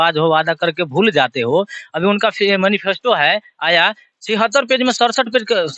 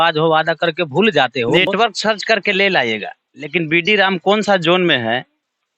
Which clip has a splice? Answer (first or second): second